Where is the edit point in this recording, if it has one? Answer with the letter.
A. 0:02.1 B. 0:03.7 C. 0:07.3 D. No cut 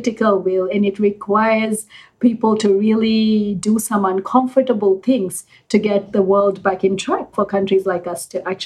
C